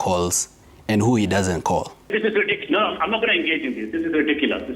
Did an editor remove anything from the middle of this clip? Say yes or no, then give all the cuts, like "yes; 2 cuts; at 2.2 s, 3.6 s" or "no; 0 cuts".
yes; 1 cut; at 2.0 s